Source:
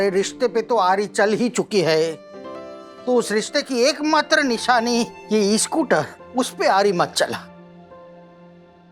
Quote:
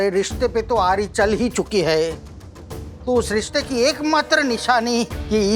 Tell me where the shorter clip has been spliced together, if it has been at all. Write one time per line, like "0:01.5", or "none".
none